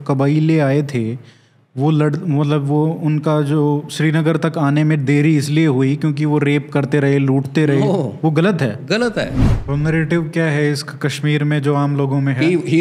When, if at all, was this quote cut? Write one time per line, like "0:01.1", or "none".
0:09.5